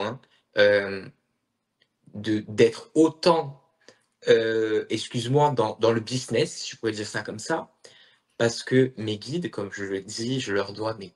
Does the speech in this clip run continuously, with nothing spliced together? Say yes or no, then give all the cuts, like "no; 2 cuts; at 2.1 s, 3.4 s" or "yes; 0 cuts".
yes; 0 cuts